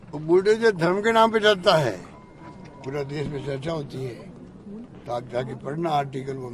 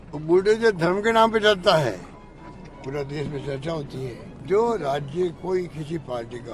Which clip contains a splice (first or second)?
second